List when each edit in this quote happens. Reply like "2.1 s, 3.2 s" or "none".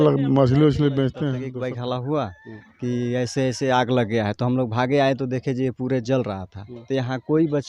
1.4 s